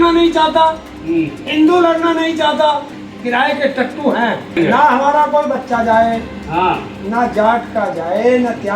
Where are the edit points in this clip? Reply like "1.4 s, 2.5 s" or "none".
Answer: 3.0 s, 4.6 s